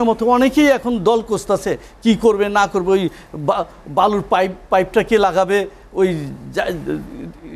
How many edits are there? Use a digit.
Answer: 0